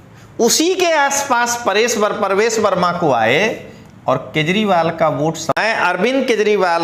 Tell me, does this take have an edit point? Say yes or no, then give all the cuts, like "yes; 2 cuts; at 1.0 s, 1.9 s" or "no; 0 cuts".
yes; 1 cut; at 5.6 s